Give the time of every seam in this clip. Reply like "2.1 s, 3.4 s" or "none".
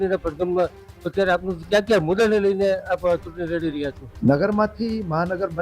4.0 s